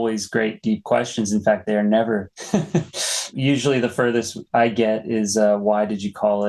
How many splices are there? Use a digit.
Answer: 0